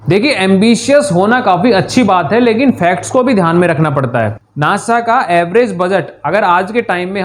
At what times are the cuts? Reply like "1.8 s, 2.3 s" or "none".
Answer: 4.4 s